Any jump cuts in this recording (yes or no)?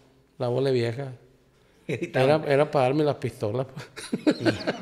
no